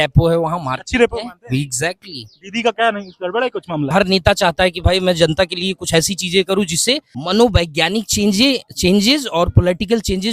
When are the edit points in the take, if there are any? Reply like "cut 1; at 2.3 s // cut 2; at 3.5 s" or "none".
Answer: cut 1; at 3.9 s // cut 2; at 7.1 s